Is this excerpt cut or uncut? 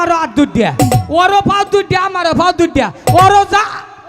uncut